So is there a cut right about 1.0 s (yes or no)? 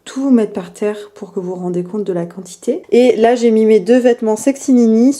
no